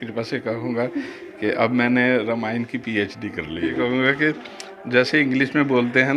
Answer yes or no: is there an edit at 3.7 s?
yes